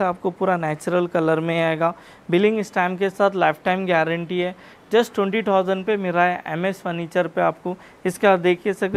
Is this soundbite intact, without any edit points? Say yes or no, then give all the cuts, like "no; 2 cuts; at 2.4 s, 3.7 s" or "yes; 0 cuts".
yes; 0 cuts